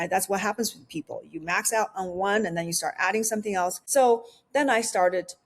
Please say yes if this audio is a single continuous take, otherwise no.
no